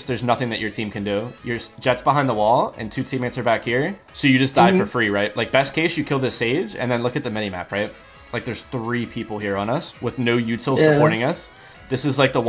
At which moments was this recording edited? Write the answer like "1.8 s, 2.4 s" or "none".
none